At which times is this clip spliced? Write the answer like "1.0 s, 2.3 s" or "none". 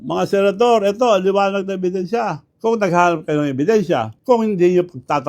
2.4 s, 4.1 s